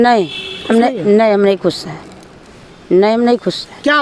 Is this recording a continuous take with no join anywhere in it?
yes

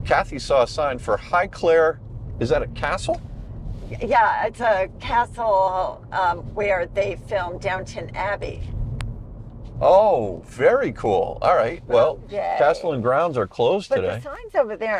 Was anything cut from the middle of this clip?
yes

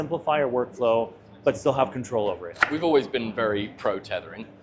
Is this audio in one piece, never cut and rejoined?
yes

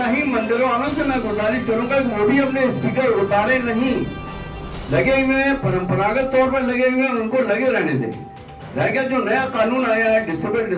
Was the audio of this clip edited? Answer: no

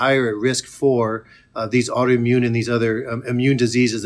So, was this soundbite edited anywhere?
no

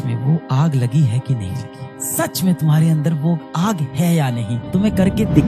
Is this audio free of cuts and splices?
yes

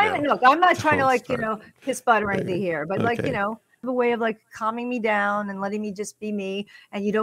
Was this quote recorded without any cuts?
no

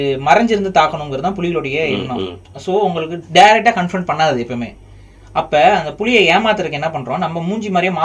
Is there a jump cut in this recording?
no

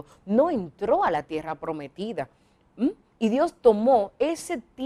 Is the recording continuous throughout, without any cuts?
yes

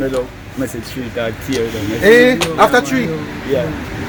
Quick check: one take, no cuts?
yes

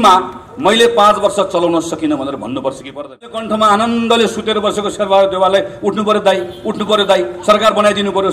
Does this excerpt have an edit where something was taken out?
yes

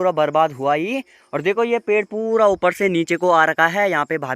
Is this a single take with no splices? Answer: yes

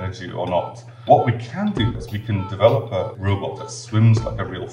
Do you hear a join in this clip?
yes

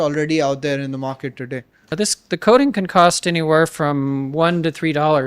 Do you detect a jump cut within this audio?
yes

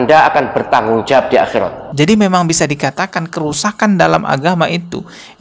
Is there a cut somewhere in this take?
yes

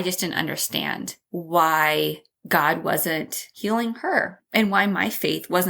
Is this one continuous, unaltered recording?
no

